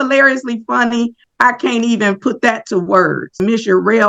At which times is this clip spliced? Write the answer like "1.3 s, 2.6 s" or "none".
1.2 s, 3.4 s